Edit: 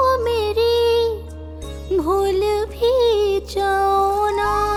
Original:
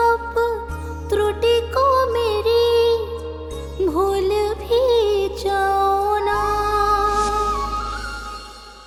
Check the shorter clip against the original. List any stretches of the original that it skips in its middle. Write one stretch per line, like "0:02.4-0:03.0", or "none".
none